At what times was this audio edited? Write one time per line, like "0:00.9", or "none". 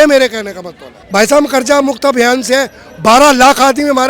0:01.0